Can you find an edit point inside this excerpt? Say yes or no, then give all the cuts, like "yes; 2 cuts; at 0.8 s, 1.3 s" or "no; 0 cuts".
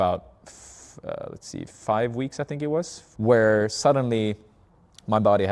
yes; 1 cut; at 3.0 s